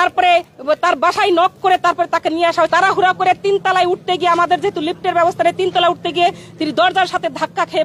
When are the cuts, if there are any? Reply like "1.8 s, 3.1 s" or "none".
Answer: 2.7 s